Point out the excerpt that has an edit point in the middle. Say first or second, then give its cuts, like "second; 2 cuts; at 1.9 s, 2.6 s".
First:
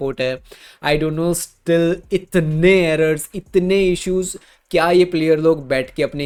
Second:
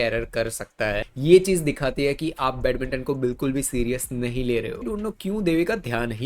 second; 2 cuts; at 1.1 s, 4.8 s